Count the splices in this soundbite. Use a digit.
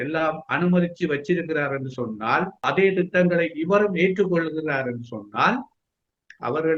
1